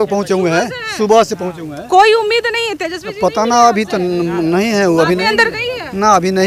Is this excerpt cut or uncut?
uncut